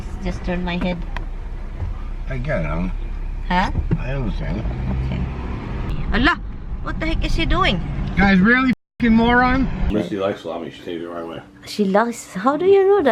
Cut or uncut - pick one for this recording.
cut